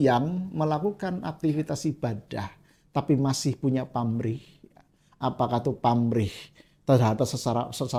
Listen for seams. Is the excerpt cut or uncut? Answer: uncut